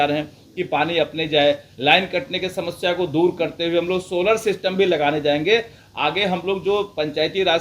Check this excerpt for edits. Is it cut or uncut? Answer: uncut